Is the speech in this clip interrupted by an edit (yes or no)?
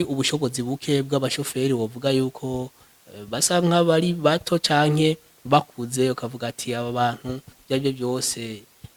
no